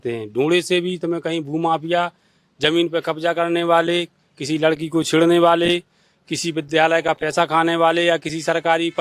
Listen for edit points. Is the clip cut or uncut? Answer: uncut